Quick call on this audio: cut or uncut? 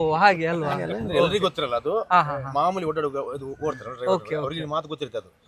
uncut